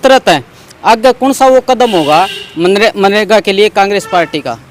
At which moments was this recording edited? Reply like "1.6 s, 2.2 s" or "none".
none